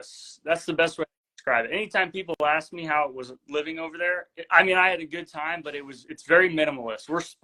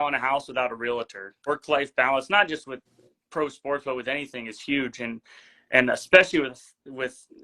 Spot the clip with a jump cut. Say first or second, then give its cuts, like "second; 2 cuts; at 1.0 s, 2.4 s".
second; 1 cut; at 1.5 s